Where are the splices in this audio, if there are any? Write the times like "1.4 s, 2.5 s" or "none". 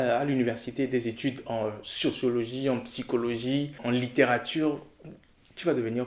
3.8 s